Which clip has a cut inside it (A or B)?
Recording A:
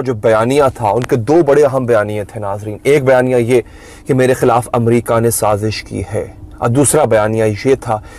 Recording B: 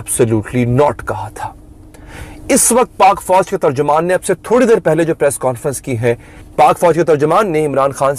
B